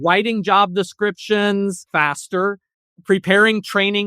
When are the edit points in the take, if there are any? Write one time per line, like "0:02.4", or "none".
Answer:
0:01.8